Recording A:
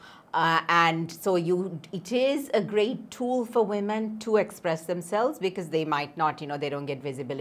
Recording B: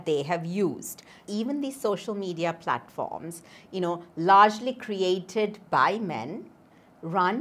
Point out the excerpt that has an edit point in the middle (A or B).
B